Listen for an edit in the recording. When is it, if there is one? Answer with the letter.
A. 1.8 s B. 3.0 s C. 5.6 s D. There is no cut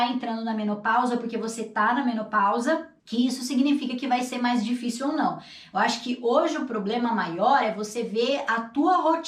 B